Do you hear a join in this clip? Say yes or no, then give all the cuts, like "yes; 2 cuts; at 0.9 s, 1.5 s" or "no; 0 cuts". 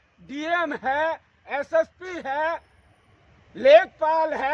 no; 0 cuts